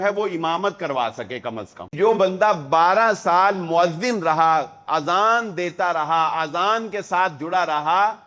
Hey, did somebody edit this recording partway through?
yes; 1 cut; at 1.9 s

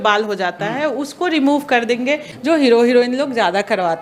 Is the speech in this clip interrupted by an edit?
yes; 1 cut; at 2.3 s

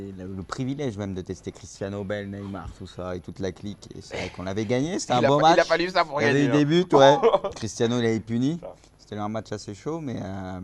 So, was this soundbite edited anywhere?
no; 0 cuts

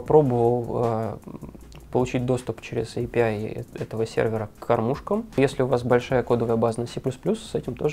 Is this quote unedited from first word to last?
no; 1 cut; at 5.4 s

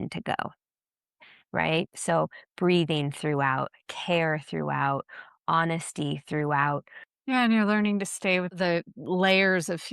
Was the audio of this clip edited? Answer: yes; 2 cuts; at 7.0 s, 8.5 s

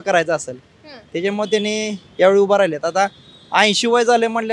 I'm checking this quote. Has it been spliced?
no; 0 cuts

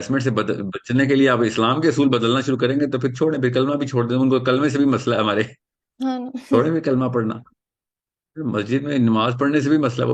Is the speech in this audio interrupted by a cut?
no; 0 cuts

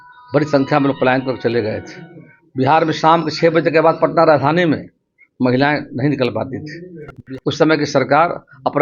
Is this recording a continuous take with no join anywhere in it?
no; 1 cut; at 7.1 s

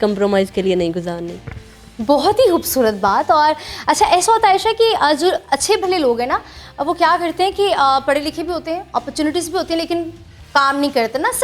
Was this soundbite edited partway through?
no; 0 cuts

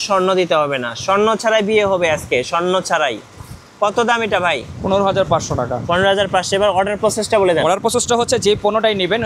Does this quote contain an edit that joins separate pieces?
no; 0 cuts

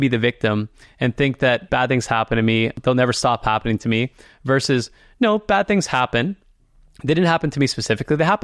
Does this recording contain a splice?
yes; 2 cuts; at 1.6 s, 2.8 s

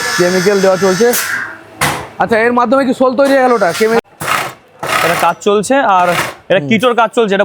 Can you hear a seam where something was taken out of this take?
yes; 1 cut; at 4.0 s

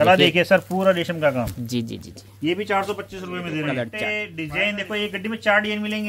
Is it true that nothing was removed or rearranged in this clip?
no; 1 cut; at 3.9 s

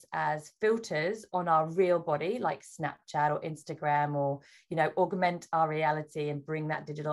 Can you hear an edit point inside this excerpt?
no; 0 cuts

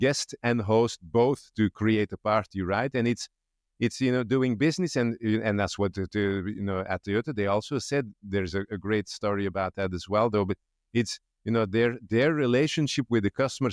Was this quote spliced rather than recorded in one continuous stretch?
no; 0 cuts

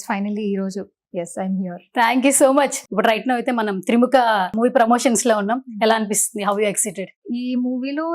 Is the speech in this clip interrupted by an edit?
yes; 3 cuts; at 2.8 s, 4.5 s, 7.2 s

